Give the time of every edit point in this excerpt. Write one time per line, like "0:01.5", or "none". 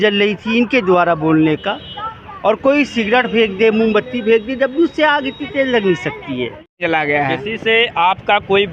0:06.8